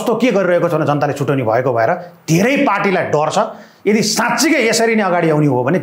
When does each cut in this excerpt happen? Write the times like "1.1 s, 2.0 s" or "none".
none